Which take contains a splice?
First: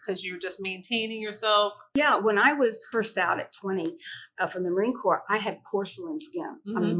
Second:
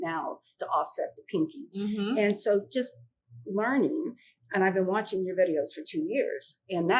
first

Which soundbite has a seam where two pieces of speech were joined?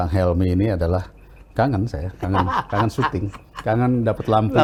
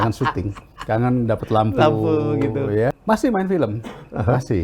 second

